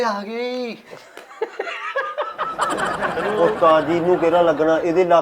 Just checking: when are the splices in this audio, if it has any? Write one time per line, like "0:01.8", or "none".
0:03.0

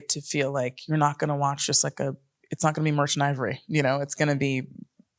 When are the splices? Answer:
none

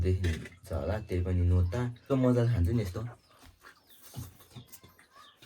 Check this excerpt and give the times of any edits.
0:02.0

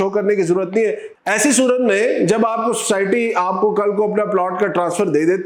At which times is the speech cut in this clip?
none

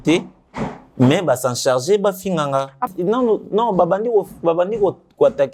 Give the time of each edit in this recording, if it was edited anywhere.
0:02.9

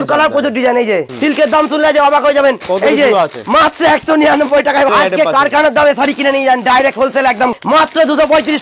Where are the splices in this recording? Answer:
0:01.1
0:04.9
0:07.6

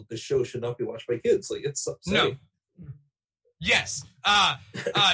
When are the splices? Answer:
none

